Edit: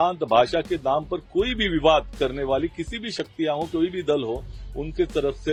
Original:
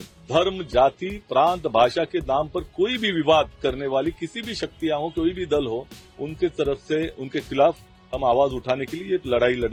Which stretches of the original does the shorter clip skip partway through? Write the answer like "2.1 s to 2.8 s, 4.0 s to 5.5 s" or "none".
none

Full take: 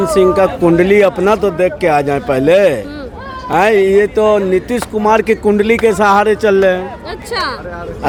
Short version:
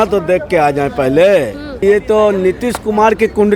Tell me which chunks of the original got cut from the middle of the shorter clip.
3.1 s to 3.9 s

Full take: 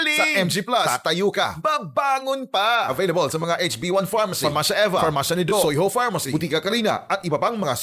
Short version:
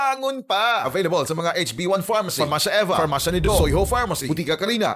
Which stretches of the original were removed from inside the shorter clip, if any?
none

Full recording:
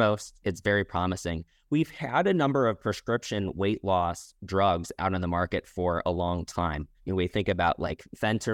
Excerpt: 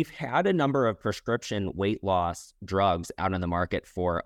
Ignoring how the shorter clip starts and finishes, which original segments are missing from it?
none

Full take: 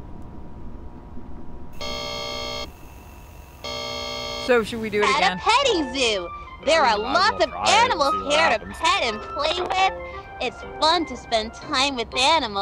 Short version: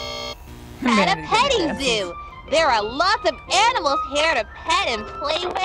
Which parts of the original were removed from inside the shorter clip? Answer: 3.2 s to 5.1 s

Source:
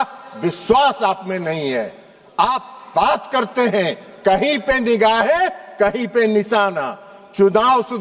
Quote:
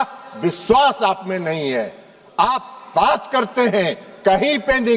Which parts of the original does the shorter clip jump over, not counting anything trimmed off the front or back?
none

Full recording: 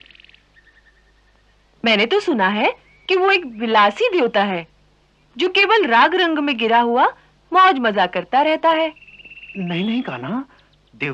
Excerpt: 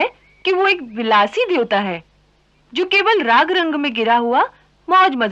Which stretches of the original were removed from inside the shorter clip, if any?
none

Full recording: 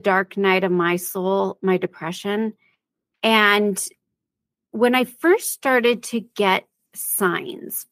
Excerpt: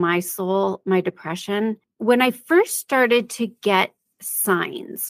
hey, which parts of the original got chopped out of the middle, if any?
2.6 s to 4.6 s

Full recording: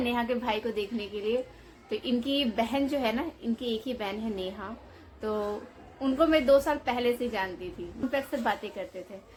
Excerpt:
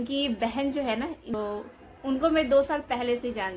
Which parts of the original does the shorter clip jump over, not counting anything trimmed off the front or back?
3.5 s to 5.3 s

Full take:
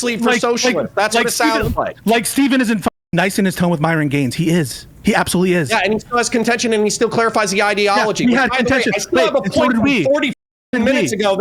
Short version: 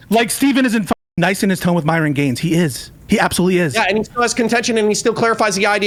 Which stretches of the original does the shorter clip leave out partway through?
none

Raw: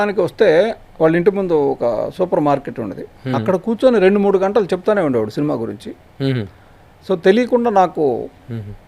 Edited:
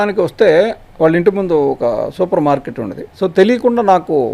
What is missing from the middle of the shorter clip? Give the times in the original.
3.0 s to 6.9 s

